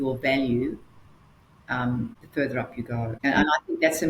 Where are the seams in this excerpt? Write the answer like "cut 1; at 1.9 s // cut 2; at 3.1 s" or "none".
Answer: cut 1; at 2.2 s // cut 2; at 3.2 s